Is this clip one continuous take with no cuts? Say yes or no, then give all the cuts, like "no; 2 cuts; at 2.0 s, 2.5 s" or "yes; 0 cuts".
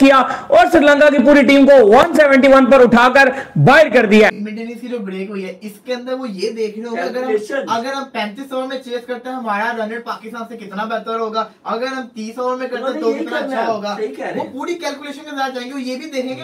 yes; 0 cuts